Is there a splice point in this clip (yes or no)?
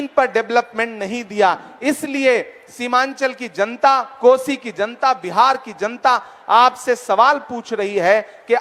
no